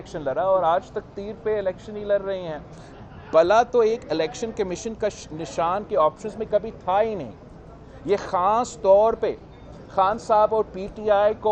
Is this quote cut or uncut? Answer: uncut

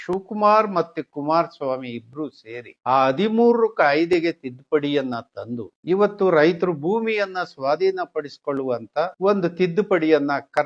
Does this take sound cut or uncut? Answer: cut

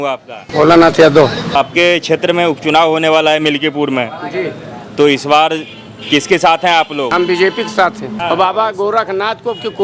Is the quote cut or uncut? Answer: cut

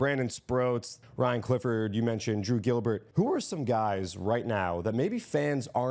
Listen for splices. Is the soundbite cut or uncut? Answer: cut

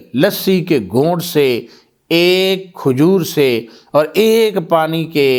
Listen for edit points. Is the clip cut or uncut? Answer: uncut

